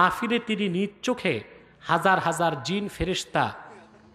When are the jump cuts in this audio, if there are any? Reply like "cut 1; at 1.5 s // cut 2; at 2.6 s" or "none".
none